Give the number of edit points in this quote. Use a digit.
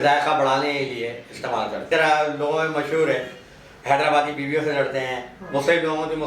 1